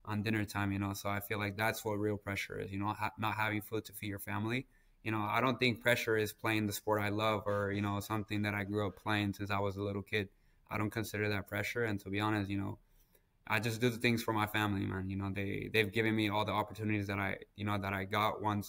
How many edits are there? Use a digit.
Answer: 0